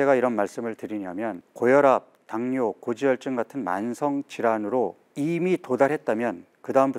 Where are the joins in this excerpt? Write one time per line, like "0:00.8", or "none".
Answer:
0:01.4
0:05.0